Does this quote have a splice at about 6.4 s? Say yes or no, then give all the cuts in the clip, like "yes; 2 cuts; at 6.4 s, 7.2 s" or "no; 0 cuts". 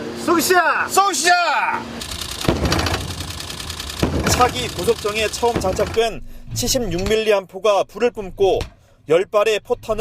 yes; 1 cut; at 6.4 s